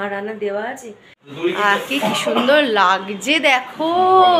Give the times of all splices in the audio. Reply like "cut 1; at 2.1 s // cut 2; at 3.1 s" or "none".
cut 1; at 1.4 s

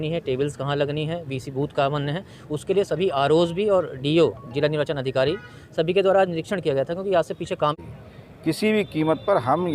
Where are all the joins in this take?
cut 1; at 7.7 s

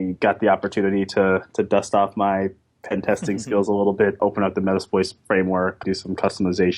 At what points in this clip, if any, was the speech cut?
cut 1; at 4.2 s // cut 2; at 5.8 s

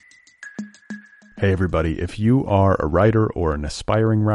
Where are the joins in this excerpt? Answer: cut 1; at 0.9 s

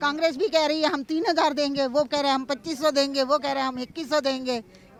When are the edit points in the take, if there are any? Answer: none

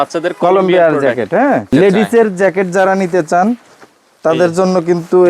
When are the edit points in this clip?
cut 1; at 1.7 s

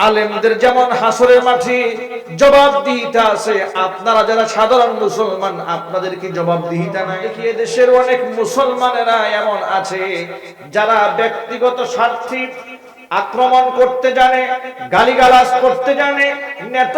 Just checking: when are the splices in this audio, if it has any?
cut 1; at 7.3 s

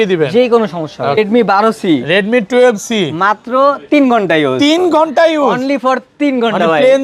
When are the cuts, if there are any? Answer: cut 1; at 1.2 s

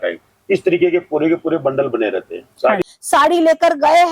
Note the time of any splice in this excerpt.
cut 1; at 2.8 s

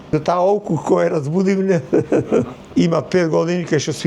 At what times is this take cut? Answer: cut 1; at 2.6 s

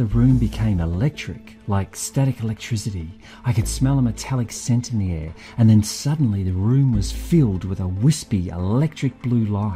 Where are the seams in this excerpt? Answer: none

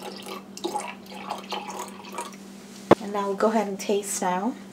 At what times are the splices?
cut 1; at 2.9 s

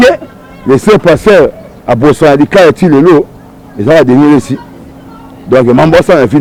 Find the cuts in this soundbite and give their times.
none

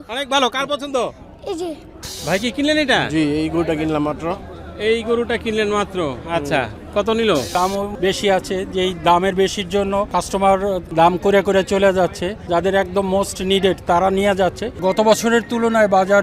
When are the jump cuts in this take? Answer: cut 1; at 2.0 s // cut 2; at 7.6 s // cut 3; at 10.1 s // cut 4; at 10.9 s // cut 5; at 12.3 s // cut 6; at 14.8 s

